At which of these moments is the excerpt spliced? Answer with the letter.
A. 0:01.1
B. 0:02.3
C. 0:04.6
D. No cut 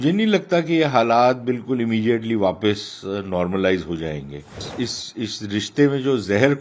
C